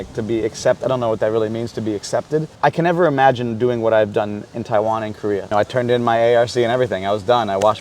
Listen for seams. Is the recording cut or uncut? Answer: cut